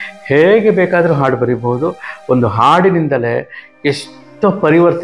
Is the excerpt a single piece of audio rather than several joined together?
yes; 0 cuts

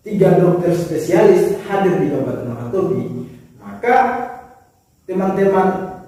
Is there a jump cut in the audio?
no; 0 cuts

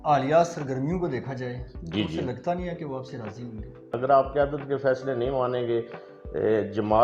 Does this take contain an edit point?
yes; 1 cut; at 3.9 s

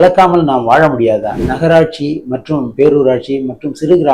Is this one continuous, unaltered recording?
no; 1 cut; at 1.4 s

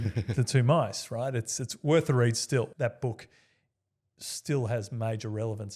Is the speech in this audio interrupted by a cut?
yes; 1 cut; at 2.7 s

